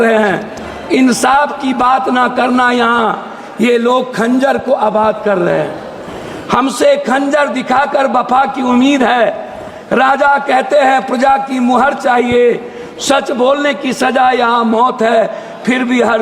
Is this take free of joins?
yes; 0 cuts

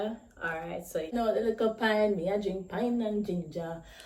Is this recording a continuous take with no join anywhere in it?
no; 1 cut; at 1.1 s

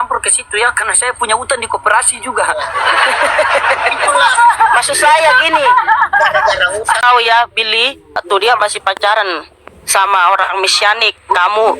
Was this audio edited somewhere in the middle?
yes; 2 cuts; at 7.0 s, 8.2 s

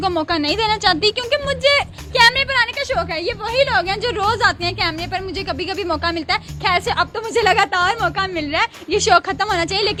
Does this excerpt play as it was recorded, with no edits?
yes; 0 cuts

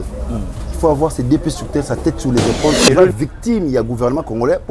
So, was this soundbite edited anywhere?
yes; 1 cut; at 2.8 s

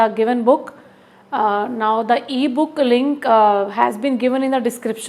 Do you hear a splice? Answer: no; 0 cuts

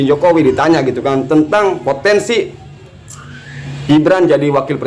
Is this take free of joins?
yes; 0 cuts

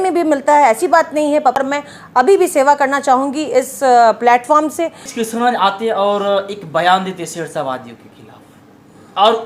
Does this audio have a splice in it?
yes; 2 cuts; at 1.6 s, 5.1 s

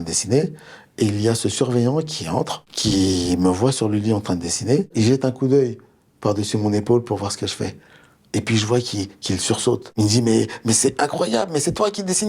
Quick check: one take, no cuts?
no; 2 cuts; at 4.9 s, 9.9 s

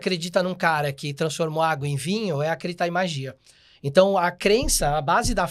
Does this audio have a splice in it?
no; 0 cuts

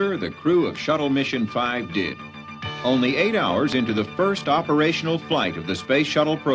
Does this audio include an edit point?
yes; 1 cut; at 3.6 s

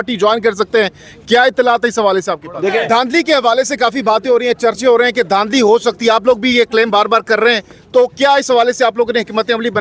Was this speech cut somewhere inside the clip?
yes; 1 cut; at 2.8 s

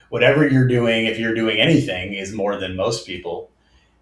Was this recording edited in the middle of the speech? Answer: no; 0 cuts

